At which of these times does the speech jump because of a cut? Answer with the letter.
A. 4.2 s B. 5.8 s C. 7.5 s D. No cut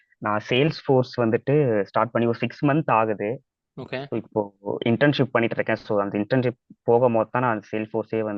D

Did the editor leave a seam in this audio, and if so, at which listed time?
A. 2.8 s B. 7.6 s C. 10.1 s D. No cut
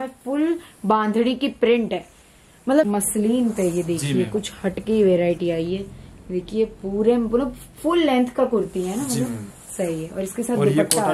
A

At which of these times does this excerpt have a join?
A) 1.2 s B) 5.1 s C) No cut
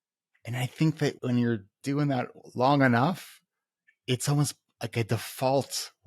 A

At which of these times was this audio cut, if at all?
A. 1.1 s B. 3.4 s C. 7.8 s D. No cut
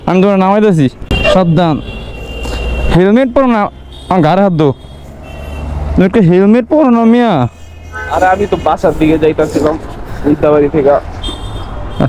A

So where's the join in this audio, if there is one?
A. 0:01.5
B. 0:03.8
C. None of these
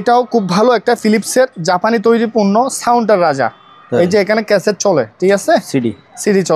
C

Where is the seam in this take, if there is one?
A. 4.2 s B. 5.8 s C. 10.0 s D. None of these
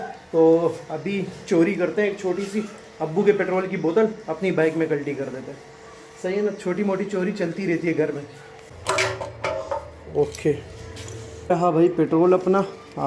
D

